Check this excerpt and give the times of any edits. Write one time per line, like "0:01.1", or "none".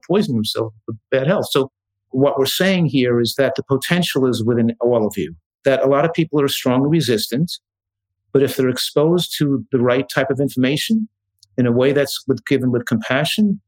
0:01.0
0:02.1
0:03.3
0:05.4

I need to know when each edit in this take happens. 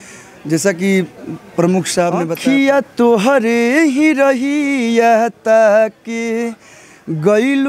0:02.3

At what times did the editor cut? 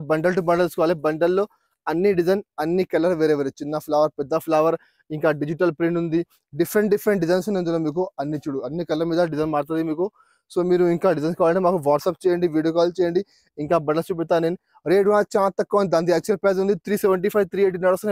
none

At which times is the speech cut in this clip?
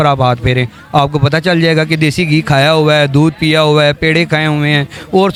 none

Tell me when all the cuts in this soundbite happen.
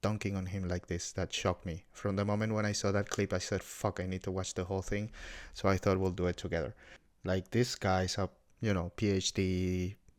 0:07.1

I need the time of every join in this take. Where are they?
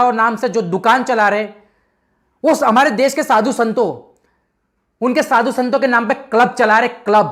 none

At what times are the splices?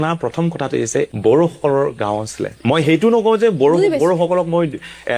0:01.1

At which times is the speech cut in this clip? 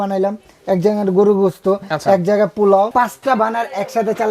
0:02.9

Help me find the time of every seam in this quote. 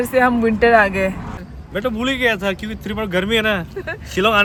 none

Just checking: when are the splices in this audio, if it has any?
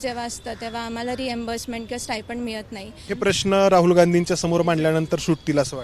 0:03.0

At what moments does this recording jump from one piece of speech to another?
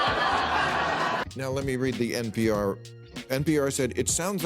0:01.2

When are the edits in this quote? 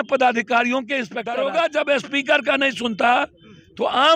0:01.2

